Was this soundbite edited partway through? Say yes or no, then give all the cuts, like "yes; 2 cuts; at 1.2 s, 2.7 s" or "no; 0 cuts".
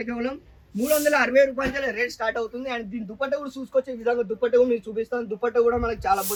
no; 0 cuts